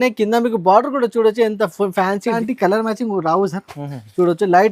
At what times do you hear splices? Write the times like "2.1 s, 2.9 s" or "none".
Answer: 2.4 s